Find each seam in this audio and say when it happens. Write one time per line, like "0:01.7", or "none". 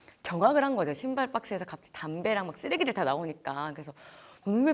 none